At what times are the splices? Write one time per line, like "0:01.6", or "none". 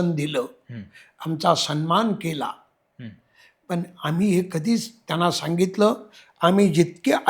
none

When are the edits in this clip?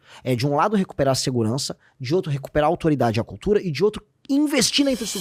none

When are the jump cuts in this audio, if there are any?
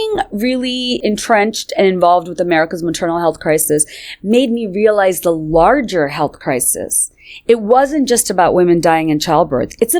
0:01.0

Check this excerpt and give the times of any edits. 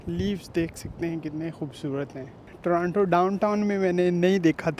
0:02.4

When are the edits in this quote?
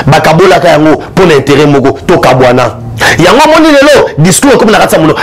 none

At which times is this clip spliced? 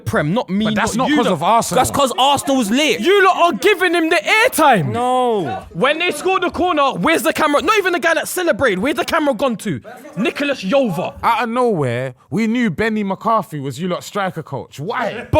0:01.7
0:03.1
0:05.4
0:11.1

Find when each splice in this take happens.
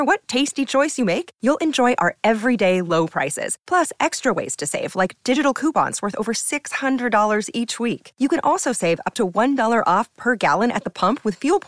none

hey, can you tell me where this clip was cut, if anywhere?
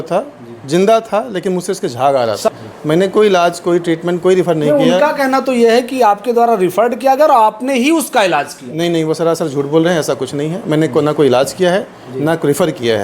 0:02.5

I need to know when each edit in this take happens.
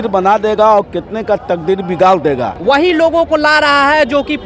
0:02.5

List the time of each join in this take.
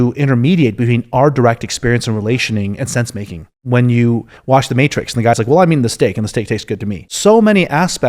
0:03.5
0:07.1

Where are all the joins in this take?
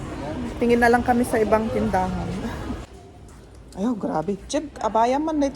0:03.0

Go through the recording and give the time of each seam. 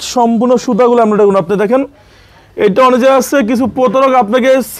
none

